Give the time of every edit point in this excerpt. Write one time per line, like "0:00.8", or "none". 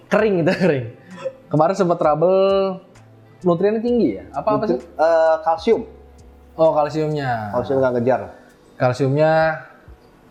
none